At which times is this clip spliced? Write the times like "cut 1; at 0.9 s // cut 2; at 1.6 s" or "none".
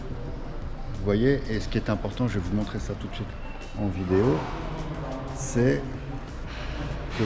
none